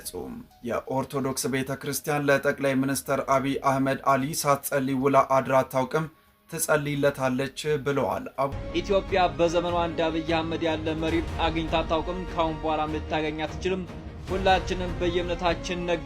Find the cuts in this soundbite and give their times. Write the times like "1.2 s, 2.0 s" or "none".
8.6 s

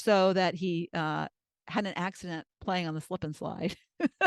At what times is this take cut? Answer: 2.5 s

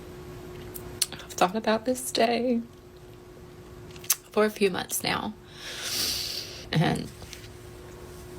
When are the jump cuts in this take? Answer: 6.7 s

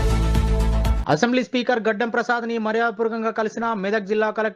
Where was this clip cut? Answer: 1.0 s

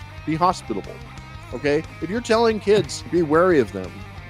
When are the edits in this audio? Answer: 3.1 s

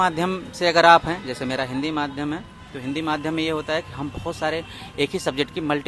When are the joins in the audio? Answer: none

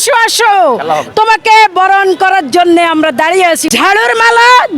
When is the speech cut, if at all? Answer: 3.6 s

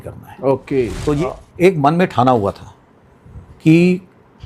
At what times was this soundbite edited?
1.2 s

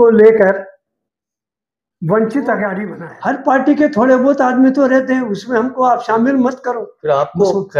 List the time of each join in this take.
2.9 s

